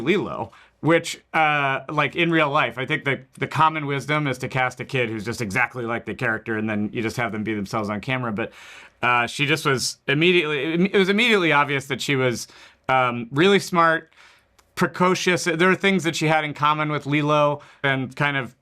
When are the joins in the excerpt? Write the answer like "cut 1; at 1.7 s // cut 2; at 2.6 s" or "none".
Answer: cut 1; at 9.0 s